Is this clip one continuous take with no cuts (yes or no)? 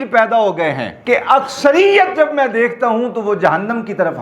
no